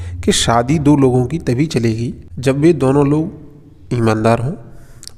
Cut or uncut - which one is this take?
cut